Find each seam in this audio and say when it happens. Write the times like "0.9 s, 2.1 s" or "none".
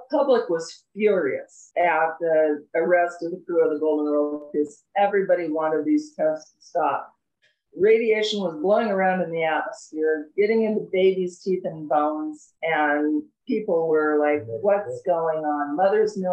1.5 s